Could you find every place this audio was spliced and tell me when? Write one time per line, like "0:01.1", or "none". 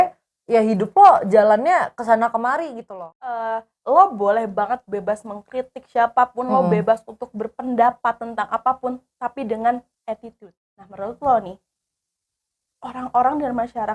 0:02.8
0:10.5